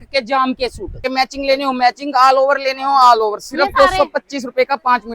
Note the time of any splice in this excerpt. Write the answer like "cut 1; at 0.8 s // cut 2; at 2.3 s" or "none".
cut 1; at 1.0 s